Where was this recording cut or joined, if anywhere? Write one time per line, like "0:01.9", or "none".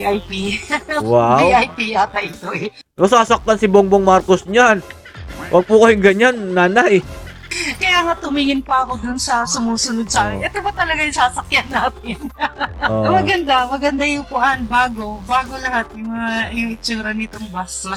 none